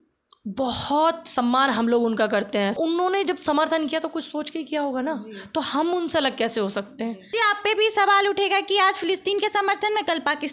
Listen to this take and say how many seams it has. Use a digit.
2